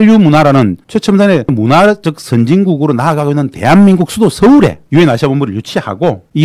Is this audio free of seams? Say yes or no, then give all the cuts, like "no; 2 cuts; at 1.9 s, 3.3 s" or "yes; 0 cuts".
no; 1 cut; at 1.5 s